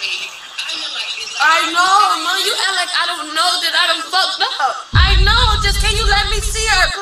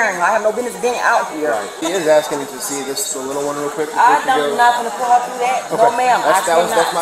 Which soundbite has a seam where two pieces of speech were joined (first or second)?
second